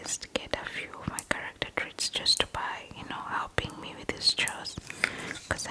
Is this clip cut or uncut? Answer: uncut